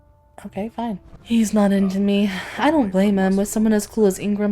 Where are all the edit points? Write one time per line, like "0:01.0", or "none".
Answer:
0:01.1